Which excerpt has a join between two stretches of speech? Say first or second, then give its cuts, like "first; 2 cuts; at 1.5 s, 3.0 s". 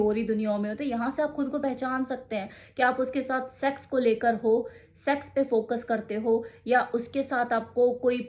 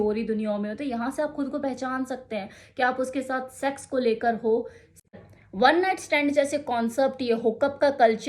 second; 1 cut; at 4.9 s